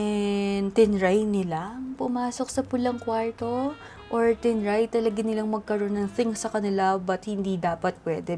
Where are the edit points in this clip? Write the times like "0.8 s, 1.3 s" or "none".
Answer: none

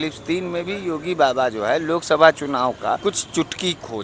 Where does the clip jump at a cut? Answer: 3.0 s

